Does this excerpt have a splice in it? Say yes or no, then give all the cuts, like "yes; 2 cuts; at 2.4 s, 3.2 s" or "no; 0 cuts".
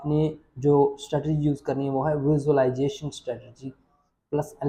no; 0 cuts